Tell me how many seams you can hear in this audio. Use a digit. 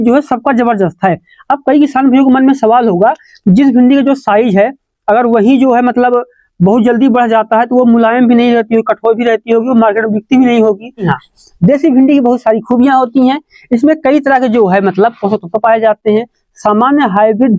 1